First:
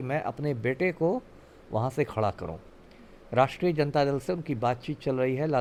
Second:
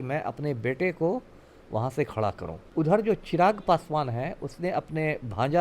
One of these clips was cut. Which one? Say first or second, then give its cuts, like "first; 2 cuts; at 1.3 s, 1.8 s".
second; 1 cut; at 2.5 s